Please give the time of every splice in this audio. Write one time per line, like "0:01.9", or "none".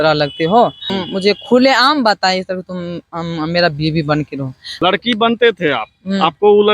0:01.0
0:04.7